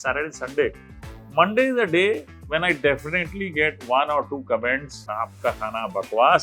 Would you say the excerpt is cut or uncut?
cut